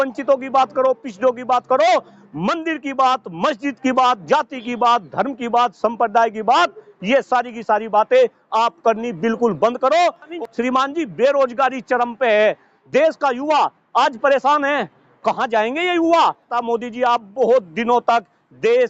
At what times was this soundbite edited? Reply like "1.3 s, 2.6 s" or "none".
10.3 s, 16.6 s